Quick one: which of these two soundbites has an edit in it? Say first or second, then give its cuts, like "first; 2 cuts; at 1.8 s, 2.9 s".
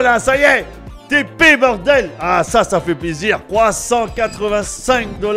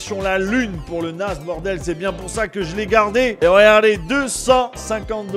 second; 1 cut; at 3.3 s